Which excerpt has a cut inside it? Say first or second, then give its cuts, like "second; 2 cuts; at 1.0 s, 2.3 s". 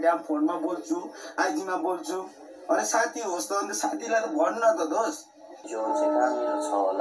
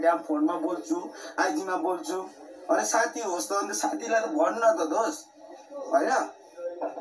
first; 1 cut; at 5.6 s